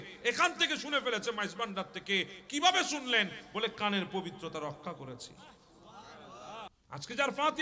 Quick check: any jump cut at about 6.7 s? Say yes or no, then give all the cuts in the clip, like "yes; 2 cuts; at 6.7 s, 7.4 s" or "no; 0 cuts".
yes; 1 cut; at 6.7 s